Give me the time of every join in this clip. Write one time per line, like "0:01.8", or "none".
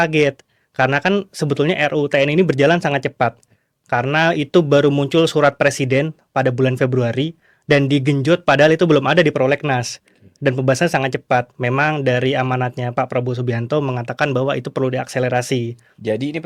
none